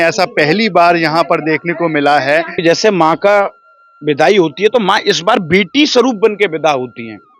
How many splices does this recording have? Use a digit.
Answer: 1